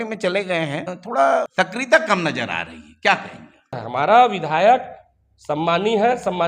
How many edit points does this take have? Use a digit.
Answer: 3